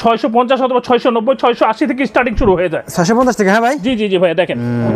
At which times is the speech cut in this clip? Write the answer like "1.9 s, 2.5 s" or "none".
none